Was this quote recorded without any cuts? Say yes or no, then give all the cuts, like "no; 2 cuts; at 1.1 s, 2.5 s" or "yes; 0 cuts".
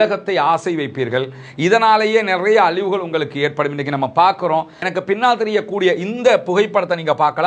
no; 1 cut; at 4.9 s